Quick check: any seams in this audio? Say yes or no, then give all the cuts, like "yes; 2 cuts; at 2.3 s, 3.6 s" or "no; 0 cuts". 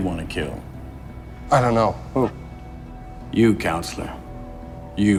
no; 0 cuts